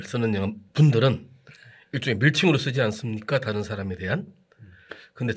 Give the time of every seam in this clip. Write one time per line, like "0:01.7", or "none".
none